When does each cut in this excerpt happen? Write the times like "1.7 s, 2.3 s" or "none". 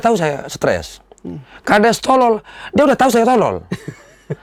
none